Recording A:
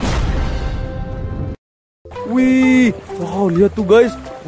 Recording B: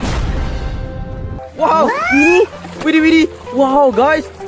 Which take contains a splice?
B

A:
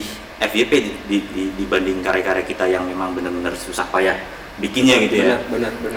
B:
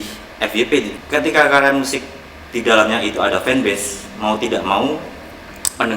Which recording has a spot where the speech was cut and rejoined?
B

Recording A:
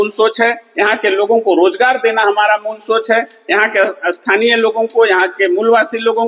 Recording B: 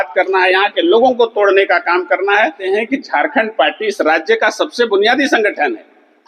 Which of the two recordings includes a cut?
B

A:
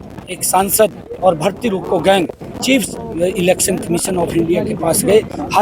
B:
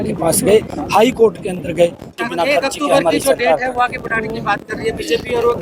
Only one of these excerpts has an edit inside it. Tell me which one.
B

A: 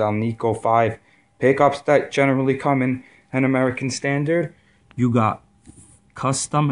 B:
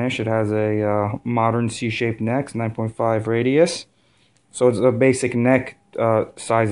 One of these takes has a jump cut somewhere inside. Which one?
B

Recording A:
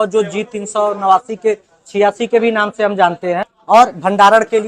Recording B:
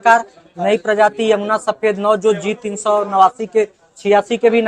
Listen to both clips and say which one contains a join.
A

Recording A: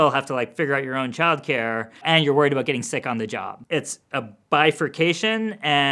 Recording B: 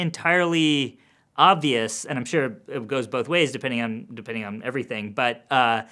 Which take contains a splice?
A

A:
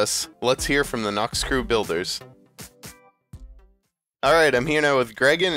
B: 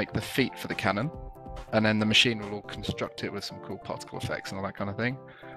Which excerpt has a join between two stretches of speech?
A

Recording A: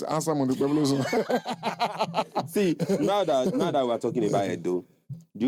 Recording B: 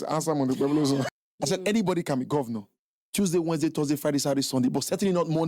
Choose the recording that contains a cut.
B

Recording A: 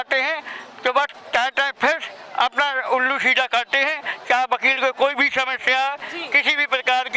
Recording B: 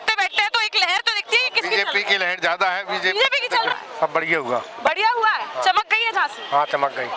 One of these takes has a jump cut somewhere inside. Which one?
B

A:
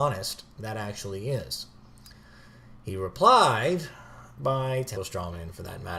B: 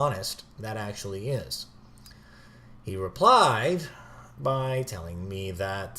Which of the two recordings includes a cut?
B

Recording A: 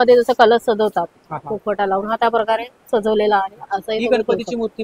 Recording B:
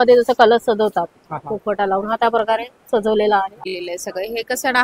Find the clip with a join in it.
B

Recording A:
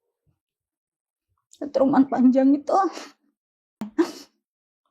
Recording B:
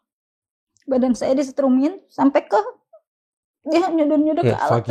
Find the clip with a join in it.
A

